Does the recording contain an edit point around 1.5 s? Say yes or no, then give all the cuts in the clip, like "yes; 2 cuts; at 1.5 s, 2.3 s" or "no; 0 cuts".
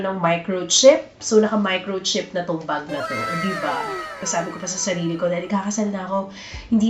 no; 1 cut; at 4.2 s